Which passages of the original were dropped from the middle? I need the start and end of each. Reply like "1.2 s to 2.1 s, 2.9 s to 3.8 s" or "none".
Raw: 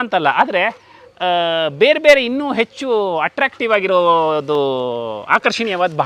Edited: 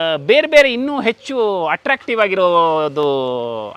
none